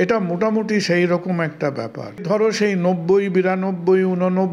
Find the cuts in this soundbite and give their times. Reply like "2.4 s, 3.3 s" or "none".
2.2 s